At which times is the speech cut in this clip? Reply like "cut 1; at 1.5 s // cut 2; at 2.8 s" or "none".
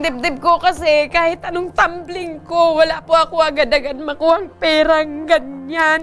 none